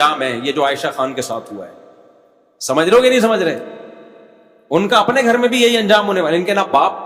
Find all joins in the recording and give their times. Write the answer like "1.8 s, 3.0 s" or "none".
none